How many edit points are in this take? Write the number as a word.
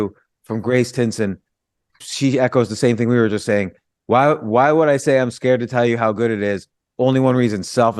one